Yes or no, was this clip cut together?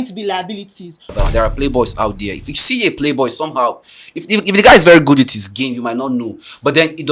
yes